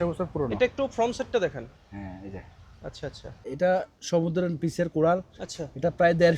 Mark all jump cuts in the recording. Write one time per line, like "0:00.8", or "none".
0:03.5